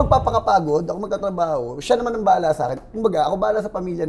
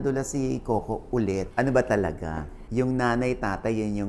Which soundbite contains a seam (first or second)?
second